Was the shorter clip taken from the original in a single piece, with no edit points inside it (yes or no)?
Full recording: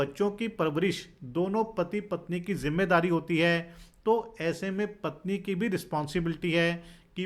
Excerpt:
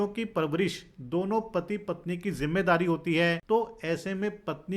no